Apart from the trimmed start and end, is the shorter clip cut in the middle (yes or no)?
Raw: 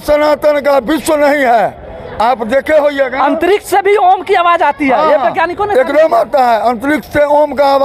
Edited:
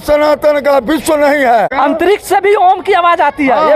yes